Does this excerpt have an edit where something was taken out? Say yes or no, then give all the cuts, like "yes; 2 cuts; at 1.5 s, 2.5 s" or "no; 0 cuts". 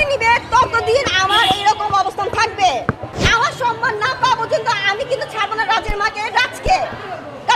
yes; 1 cut; at 3.1 s